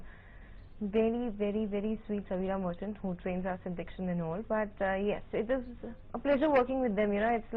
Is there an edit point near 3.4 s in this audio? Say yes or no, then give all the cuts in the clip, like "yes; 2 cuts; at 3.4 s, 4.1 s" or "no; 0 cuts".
yes; 1 cut; at 3.4 s